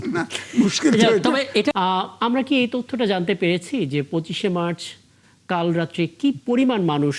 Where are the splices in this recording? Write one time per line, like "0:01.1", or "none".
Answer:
0:01.7